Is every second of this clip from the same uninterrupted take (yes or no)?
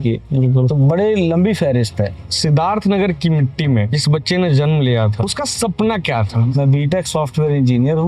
no